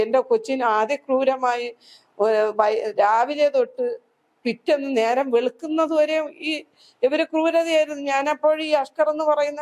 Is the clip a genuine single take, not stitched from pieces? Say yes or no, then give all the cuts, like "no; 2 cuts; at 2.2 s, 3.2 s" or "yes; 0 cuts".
yes; 0 cuts